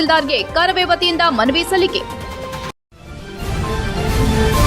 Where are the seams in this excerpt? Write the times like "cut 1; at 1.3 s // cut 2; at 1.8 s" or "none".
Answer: cut 1; at 2.7 s